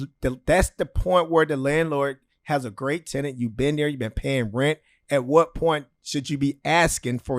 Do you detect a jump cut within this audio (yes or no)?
no